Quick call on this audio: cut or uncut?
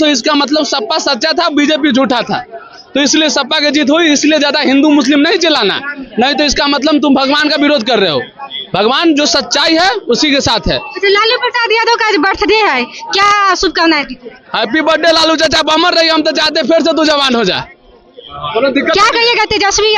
uncut